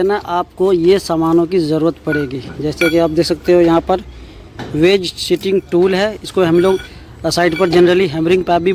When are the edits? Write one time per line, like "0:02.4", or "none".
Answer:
none